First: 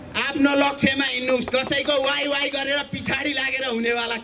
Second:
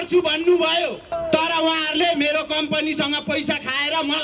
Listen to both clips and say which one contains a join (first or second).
second